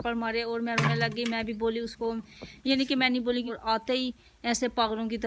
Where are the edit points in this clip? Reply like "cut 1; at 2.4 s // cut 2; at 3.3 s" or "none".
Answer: cut 1; at 3.5 s